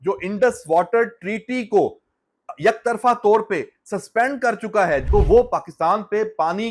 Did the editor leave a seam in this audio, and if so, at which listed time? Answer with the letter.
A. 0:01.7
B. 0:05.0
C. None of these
B